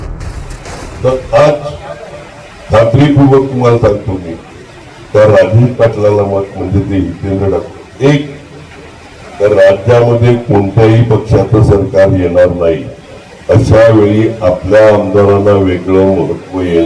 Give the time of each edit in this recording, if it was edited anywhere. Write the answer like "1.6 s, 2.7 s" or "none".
0.9 s